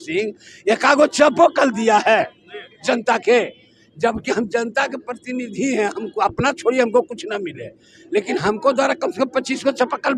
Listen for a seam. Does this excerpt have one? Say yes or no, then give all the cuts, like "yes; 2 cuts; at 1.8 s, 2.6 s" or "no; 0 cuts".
no; 0 cuts